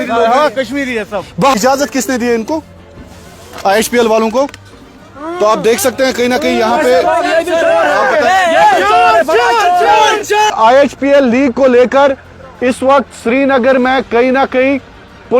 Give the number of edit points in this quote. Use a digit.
2